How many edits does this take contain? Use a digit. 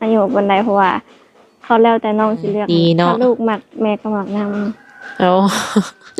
1